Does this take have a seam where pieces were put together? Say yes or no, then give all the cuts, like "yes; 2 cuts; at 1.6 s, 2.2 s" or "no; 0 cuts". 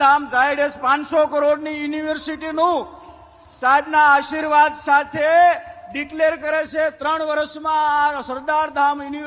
no; 0 cuts